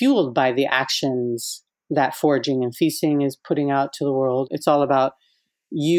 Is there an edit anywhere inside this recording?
yes; 1 cut; at 4.5 s

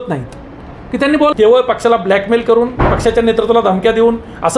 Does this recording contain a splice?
yes; 1 cut; at 1.3 s

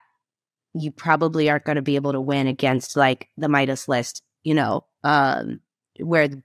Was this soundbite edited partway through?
no; 0 cuts

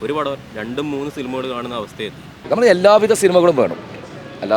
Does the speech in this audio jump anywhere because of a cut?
yes; 1 cut; at 2.3 s

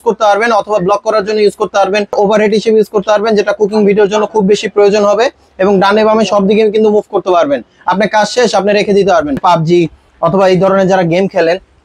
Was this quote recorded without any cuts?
no; 2 cuts; at 2.1 s, 9.4 s

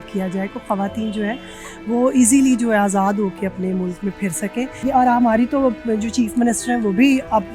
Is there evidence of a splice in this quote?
yes; 1 cut; at 4.8 s

